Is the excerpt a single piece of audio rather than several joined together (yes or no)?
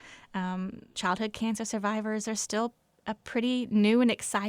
no